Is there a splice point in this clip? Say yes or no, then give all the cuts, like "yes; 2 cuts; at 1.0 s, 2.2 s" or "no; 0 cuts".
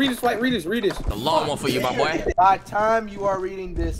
yes; 2 cuts; at 1.1 s, 2.2 s